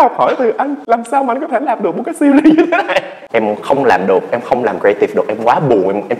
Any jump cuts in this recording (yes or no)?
yes